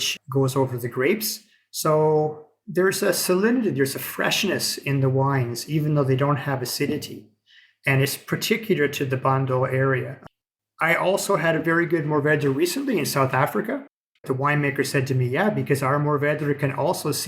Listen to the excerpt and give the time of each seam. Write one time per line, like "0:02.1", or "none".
0:14.1